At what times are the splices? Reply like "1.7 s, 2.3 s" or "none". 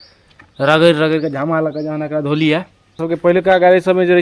3.0 s